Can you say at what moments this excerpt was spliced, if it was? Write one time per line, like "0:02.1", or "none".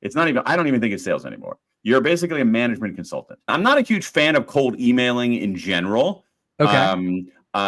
0:03.5